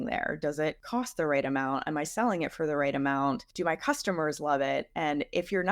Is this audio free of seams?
no; 2 cuts; at 0.8 s, 3.5 s

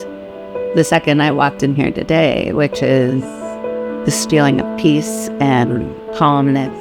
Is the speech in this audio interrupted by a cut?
no; 0 cuts

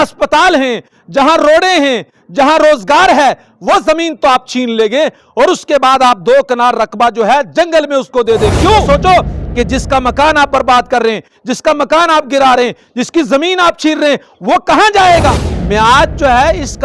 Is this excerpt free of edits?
no; 2 cuts; at 8.8 s, 15.5 s

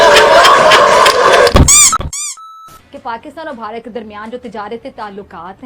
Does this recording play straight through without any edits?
no; 1 cut; at 1.9 s

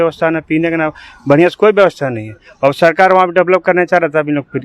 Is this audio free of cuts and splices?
yes; 0 cuts

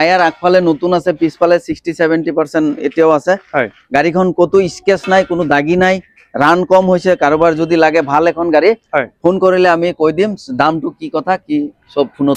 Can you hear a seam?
no; 0 cuts

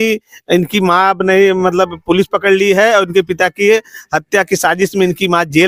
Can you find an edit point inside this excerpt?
no; 0 cuts

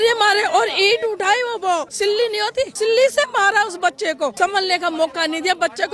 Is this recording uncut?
no; 2 cuts; at 2.2 s, 4.3 s

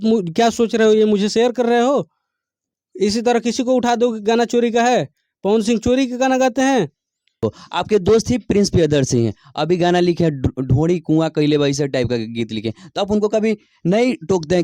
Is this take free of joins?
no; 1 cut; at 7.4 s

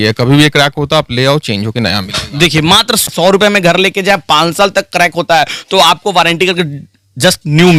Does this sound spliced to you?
no; 0 cuts

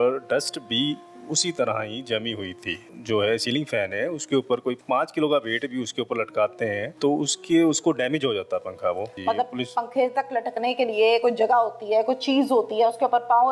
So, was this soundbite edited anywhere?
yes; 3 cuts; at 2.9 s, 4.8 s, 6.9 s

